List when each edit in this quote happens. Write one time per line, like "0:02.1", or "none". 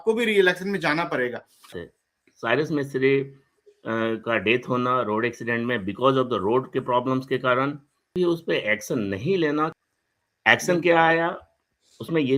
0:01.8
0:08.1
0:09.7